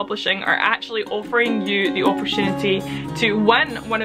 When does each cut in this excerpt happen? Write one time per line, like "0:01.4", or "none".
none